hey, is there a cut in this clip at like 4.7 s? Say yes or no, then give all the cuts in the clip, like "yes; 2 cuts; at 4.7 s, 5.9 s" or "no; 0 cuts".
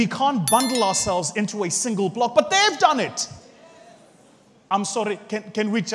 yes; 1 cut; at 4.7 s